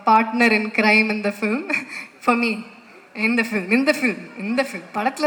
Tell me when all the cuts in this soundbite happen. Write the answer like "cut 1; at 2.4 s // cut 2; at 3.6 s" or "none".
none